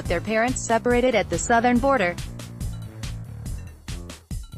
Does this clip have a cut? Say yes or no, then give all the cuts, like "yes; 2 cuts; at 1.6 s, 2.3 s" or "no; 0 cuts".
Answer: yes; 1 cut; at 2.6 s